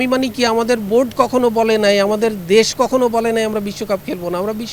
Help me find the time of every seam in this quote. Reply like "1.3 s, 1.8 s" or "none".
none